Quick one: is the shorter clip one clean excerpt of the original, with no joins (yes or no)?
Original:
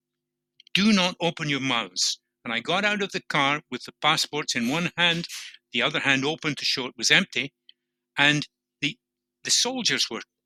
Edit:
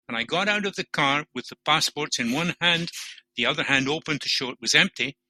yes